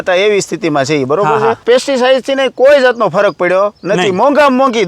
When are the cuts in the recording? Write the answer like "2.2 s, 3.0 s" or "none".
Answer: 1.6 s